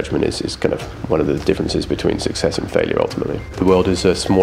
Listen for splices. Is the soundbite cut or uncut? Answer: cut